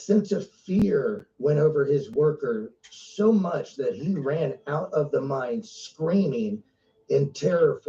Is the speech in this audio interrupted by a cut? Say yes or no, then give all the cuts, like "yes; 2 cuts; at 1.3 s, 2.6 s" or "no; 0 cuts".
no; 0 cuts